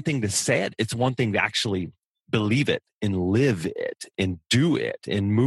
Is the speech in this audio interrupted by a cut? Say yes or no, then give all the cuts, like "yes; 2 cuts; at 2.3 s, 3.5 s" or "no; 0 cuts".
no; 0 cuts